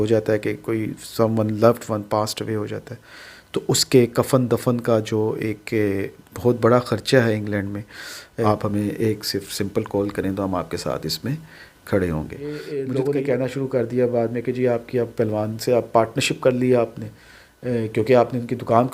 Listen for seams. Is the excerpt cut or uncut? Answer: cut